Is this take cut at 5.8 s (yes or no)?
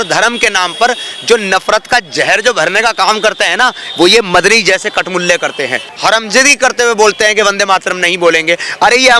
yes